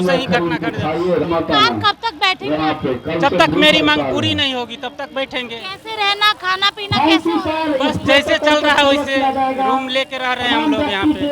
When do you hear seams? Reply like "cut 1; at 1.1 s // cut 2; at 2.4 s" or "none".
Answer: cut 1; at 1.2 s

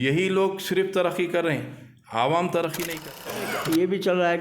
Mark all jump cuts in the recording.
cut 1; at 3.2 s

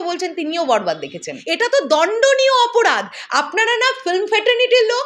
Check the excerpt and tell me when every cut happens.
cut 1; at 1.3 s

